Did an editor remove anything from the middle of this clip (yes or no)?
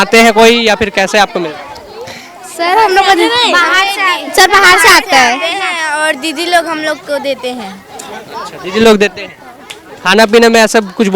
no